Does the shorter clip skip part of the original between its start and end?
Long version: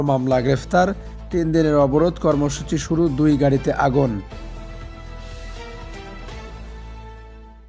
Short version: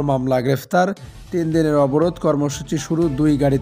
no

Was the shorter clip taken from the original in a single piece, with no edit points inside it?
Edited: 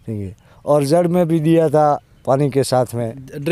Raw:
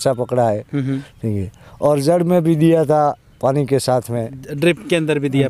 yes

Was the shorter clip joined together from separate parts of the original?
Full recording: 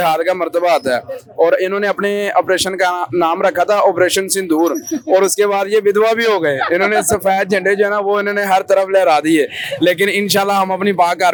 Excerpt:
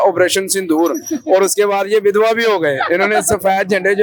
no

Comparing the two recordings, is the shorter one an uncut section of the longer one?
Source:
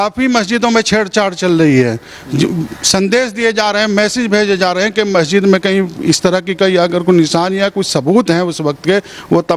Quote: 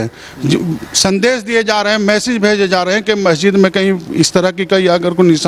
yes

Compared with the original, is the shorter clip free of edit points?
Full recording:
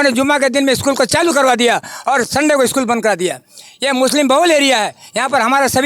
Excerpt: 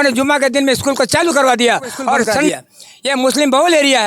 no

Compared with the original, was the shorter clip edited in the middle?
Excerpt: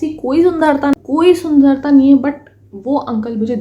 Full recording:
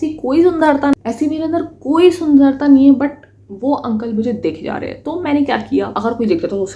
yes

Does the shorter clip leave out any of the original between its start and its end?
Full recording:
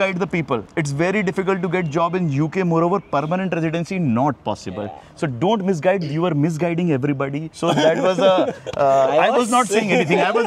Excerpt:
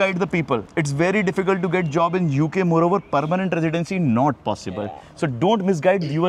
no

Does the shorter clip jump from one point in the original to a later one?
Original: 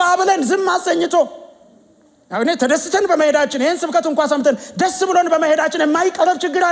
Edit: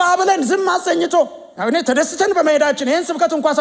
yes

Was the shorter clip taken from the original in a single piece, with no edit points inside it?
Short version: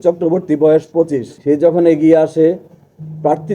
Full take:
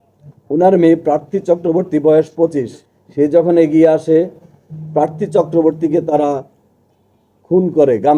no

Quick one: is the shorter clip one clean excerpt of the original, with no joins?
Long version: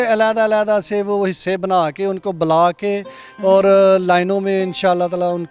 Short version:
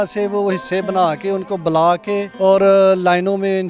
no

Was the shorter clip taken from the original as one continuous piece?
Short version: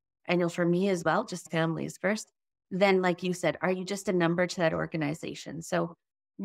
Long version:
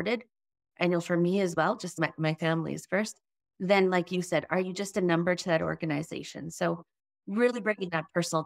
no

